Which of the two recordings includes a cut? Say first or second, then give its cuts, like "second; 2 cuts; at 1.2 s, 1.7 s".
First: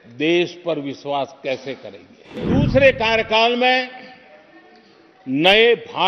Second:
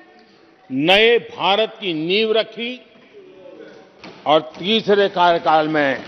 first; 1 cut; at 2.5 s